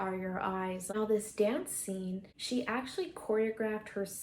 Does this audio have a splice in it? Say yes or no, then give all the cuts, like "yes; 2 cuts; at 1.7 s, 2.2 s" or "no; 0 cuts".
yes; 2 cuts; at 0.9 s, 2.3 s